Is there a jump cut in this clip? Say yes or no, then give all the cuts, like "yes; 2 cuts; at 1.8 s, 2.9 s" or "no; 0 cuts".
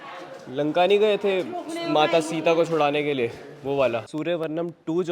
yes; 1 cut; at 4.1 s